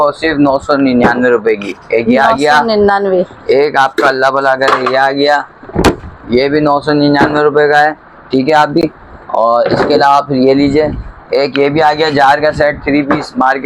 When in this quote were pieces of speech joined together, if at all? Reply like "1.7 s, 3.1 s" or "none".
none

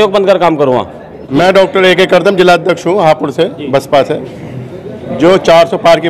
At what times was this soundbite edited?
1.2 s

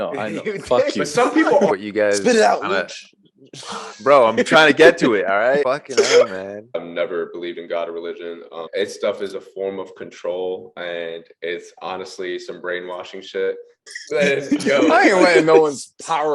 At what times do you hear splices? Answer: 1.7 s, 5.6 s, 6.7 s, 8.7 s, 13.9 s

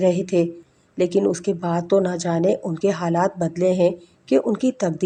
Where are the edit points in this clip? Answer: none

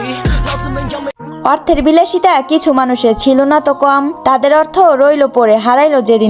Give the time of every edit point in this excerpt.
1.2 s

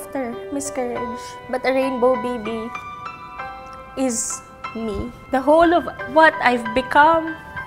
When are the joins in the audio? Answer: 1.3 s, 5.2 s

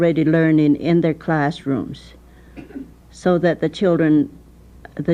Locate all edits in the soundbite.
none

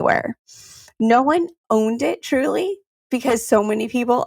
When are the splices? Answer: 3.0 s

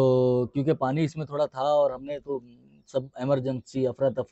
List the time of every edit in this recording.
none

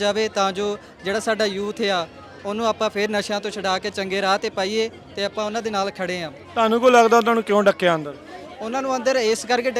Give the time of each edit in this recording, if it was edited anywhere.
none

